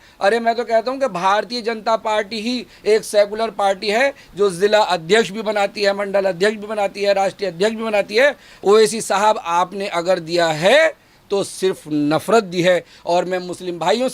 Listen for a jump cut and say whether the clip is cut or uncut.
cut